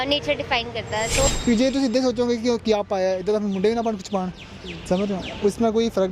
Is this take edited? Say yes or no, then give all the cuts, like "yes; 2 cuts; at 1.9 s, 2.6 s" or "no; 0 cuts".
yes; 1 cut; at 1.3 s